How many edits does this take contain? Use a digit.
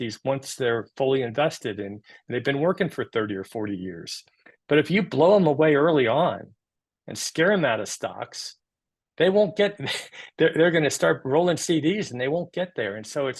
0